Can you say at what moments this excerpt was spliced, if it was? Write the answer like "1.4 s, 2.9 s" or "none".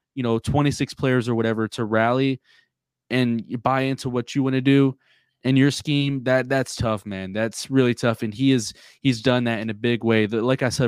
none